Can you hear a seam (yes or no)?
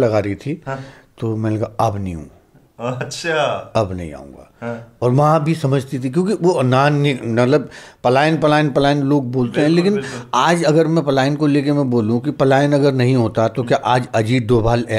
no